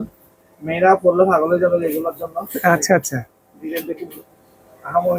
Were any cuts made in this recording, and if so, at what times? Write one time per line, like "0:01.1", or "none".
none